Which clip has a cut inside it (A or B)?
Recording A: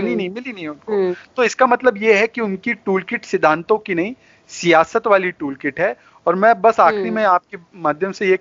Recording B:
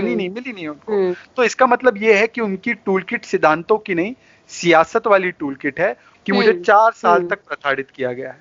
B